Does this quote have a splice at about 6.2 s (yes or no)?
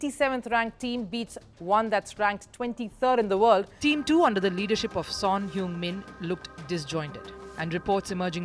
no